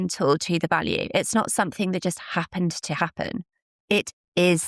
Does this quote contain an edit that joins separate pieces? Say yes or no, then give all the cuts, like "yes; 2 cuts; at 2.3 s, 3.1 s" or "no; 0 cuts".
no; 0 cuts